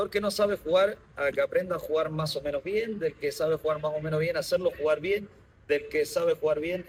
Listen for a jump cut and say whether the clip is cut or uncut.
uncut